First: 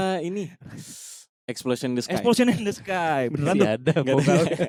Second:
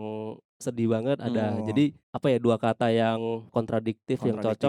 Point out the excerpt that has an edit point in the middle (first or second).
second